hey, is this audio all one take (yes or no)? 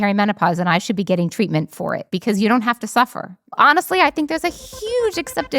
no